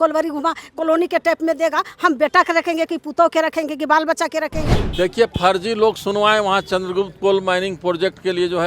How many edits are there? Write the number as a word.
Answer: one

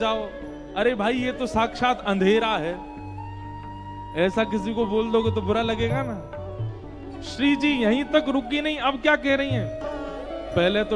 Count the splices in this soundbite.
one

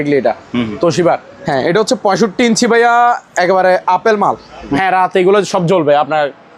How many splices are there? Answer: two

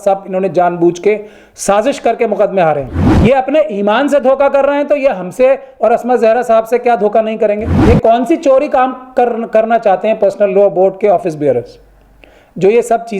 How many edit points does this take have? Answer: two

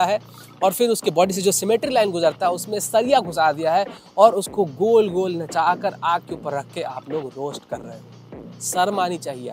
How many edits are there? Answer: zero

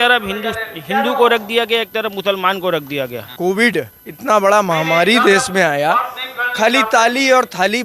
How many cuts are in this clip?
one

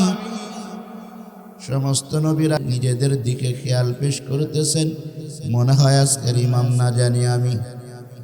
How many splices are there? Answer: one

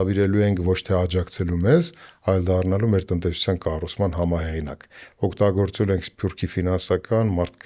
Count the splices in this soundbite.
zero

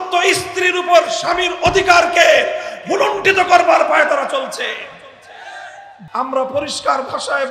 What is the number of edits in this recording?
one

